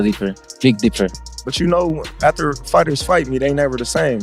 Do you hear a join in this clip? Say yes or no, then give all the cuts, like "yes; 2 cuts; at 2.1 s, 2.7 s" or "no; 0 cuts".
yes; 1 cut; at 1.2 s